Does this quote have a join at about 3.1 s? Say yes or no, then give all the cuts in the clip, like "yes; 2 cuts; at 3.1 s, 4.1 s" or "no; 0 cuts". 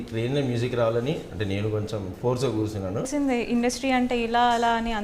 yes; 1 cut; at 3.1 s